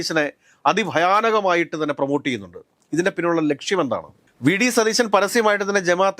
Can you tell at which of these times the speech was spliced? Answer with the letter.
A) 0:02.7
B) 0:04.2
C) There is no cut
C